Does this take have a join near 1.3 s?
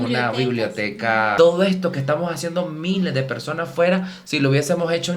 yes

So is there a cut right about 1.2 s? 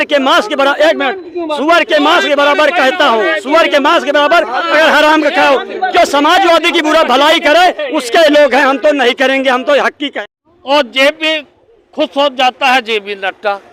no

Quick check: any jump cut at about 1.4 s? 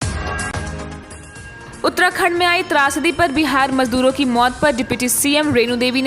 yes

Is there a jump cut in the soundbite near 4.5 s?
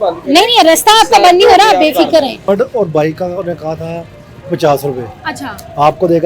no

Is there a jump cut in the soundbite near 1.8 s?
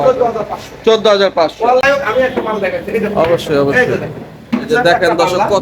yes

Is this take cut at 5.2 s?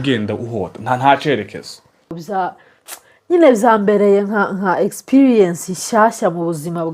no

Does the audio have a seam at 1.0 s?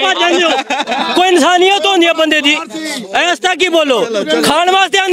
yes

